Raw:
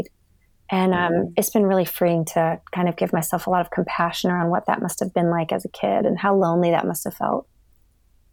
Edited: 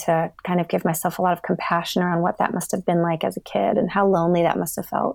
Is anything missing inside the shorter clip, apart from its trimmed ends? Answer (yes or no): no